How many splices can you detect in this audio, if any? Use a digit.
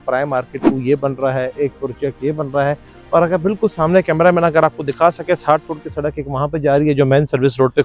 0